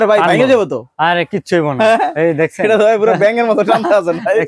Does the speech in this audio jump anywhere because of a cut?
no; 0 cuts

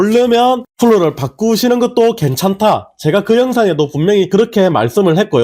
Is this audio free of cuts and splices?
no; 1 cut; at 4.3 s

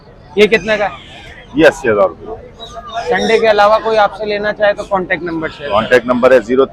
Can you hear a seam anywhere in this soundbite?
no; 0 cuts

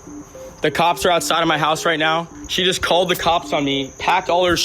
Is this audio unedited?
no; 1 cut; at 2.4 s

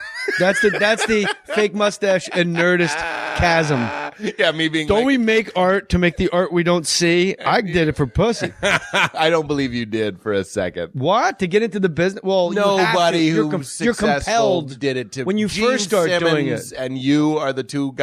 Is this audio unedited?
yes; 0 cuts

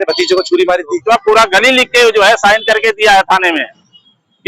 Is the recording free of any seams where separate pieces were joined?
no; 1 cut; at 1.0 s

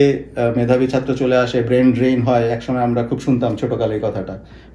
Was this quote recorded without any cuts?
yes; 0 cuts

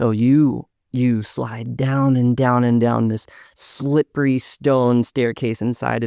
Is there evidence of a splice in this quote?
no; 0 cuts

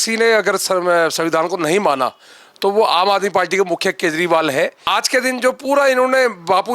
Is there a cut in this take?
yes; 1 cut; at 4.8 s

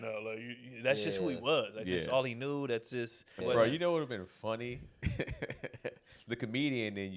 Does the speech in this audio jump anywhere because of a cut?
yes; 1 cut; at 3.3 s

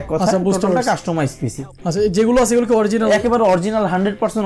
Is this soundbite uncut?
yes; 0 cuts

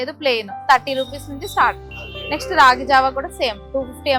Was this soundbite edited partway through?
no; 0 cuts

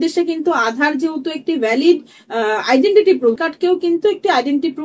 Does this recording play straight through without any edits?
no; 1 cut; at 3.4 s

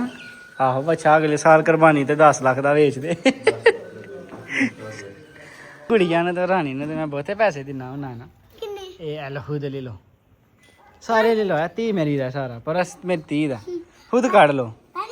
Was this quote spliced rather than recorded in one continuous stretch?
yes; 1 cut; at 5.9 s

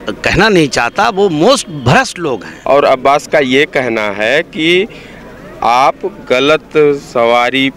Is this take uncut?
no; 1 cut; at 2.5 s

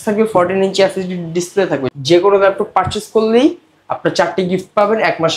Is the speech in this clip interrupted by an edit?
yes; 1 cut; at 1.9 s

